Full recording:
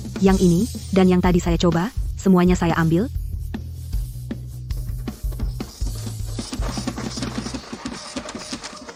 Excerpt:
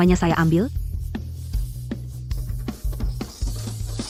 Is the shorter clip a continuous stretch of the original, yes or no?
yes